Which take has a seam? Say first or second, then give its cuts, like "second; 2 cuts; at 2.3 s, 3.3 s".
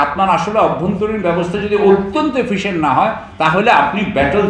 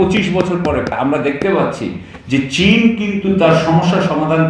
second; 1 cut; at 0.9 s